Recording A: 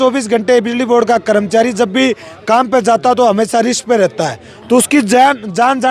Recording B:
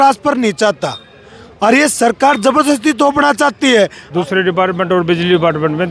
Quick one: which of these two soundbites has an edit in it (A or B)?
B